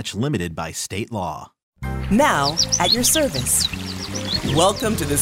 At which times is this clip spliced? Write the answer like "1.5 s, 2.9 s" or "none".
1.9 s